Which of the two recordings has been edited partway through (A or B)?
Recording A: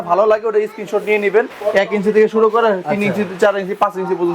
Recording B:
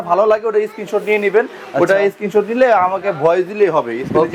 A